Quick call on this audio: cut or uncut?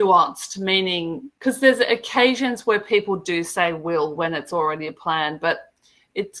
uncut